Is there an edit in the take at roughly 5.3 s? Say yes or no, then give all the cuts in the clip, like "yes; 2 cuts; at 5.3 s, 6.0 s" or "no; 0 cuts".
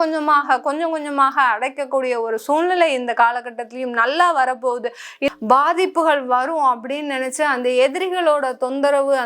yes; 1 cut; at 5.3 s